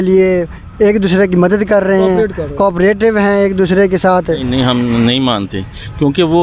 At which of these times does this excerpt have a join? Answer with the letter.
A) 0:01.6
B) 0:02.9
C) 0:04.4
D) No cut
C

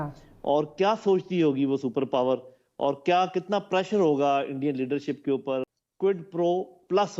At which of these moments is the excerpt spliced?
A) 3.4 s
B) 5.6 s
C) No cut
B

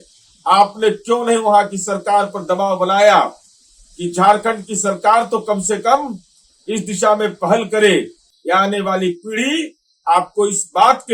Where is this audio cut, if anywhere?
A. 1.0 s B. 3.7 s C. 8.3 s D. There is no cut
C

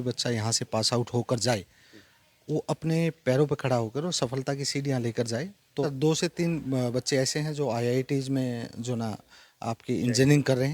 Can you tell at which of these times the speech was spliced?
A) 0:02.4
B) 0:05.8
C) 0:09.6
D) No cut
B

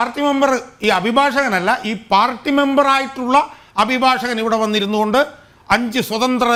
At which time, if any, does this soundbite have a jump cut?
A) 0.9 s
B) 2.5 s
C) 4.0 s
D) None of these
D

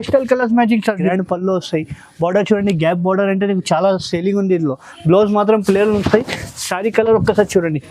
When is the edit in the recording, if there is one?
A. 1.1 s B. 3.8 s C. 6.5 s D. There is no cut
A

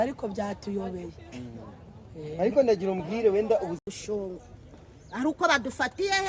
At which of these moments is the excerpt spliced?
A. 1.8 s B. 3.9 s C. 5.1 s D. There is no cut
B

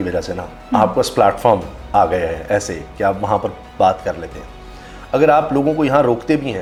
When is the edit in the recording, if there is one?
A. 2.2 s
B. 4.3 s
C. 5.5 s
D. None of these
D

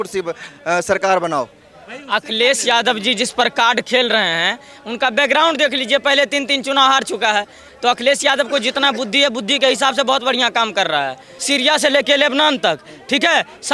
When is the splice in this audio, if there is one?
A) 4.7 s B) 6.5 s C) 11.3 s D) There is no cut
C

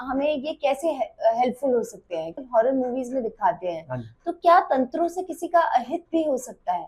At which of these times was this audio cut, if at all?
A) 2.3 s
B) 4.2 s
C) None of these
A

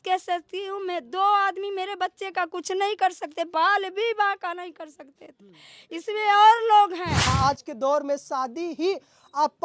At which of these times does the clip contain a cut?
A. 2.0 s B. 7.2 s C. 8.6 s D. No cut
B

